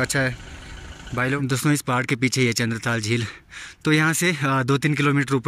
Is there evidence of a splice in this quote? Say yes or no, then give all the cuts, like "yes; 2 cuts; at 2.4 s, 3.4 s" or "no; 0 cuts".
yes; 1 cut; at 1.4 s